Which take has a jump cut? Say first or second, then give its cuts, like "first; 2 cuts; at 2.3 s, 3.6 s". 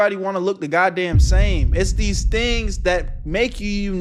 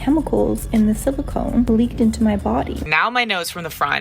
second; 2 cuts; at 1.7 s, 2.9 s